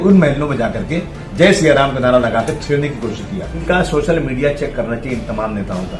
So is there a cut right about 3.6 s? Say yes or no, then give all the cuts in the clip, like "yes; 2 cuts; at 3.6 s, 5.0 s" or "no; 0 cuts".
yes; 1 cut; at 3.6 s